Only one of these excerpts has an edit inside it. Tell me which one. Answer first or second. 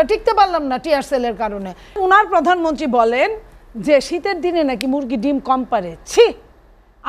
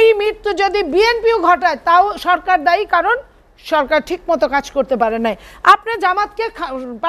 first